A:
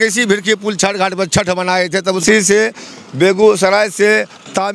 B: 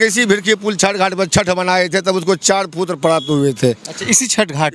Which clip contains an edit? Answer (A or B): A